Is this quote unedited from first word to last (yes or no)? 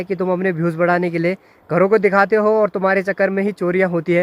yes